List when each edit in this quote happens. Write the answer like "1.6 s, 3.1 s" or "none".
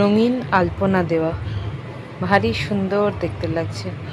none